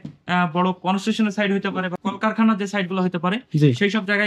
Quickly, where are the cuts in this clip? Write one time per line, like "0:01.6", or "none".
0:01.9